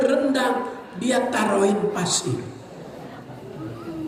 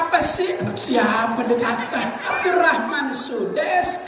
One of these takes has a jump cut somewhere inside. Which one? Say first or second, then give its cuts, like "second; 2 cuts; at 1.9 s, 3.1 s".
second; 1 cut; at 2.3 s